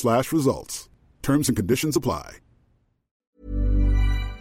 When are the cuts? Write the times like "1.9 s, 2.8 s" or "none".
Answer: 3.4 s

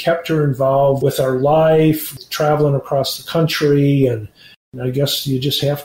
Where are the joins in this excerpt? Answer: 1.0 s, 2.2 s, 4.7 s

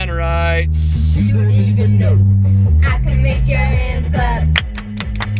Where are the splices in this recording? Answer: none

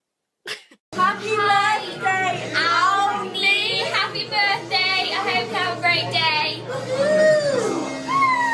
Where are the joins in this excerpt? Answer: 3.2 s

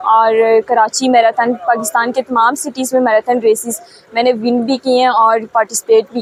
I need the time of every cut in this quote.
none

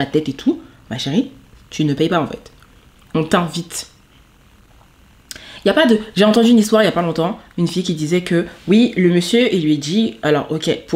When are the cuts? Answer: none

